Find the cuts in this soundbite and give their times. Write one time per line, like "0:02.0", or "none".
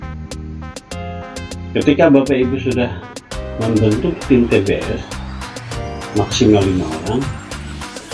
0:01.1